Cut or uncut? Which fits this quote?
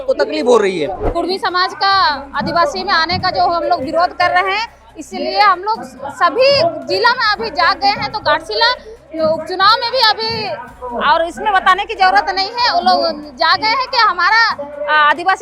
cut